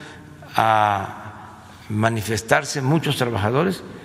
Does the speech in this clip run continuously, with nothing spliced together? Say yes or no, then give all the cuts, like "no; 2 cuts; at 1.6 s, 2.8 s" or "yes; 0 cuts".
yes; 0 cuts